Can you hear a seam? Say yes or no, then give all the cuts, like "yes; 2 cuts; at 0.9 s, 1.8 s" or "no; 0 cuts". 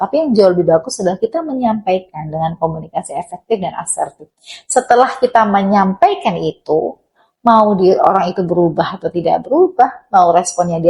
no; 0 cuts